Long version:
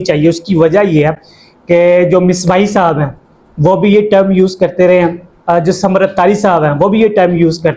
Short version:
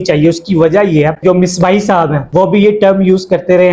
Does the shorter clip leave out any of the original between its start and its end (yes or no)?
yes